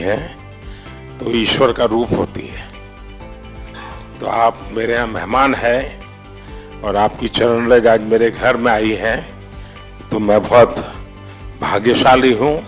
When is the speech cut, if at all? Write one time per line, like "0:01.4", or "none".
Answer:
none